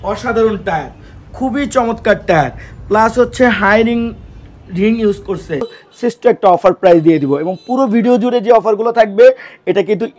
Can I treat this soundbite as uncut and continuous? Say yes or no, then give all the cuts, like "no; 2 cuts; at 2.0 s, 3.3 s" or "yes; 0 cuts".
no; 1 cut; at 5.8 s